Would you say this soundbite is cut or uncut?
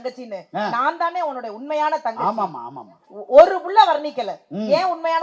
uncut